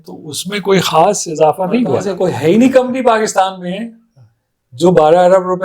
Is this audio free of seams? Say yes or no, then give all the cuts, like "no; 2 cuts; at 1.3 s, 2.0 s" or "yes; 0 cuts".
no; 1 cut; at 2.1 s